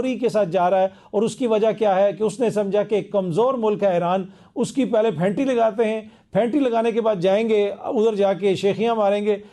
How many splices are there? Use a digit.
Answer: 0